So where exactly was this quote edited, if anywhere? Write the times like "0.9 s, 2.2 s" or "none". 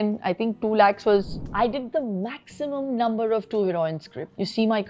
1.4 s